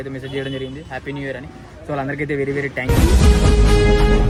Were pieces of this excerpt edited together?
no; 0 cuts

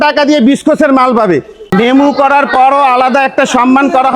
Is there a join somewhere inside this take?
yes; 1 cut; at 1.6 s

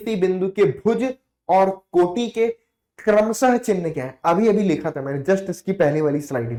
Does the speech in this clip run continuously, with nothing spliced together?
yes; 0 cuts

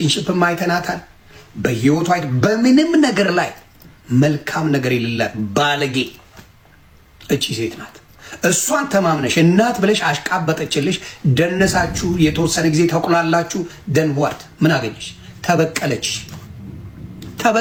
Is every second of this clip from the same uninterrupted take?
yes; 0 cuts

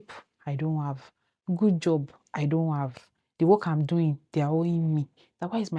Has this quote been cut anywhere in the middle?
no; 0 cuts

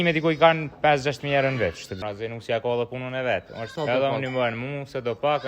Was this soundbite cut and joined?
yes; 2 cuts; at 2.0 s, 3.7 s

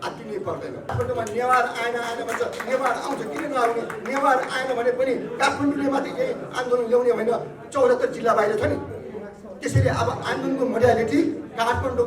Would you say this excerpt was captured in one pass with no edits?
no; 1 cut; at 0.9 s

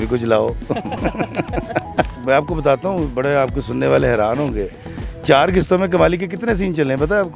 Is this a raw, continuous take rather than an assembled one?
yes; 0 cuts

